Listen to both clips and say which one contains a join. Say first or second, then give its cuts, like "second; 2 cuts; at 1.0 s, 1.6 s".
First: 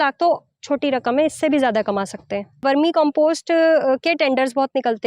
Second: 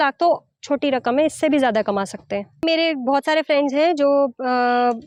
first; 1 cut; at 2.6 s